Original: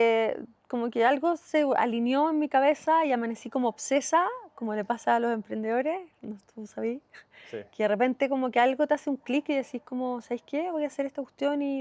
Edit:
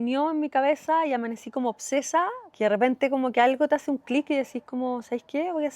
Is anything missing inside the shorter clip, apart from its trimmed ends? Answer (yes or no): yes